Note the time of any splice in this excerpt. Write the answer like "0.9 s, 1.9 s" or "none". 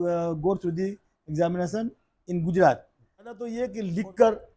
3.5 s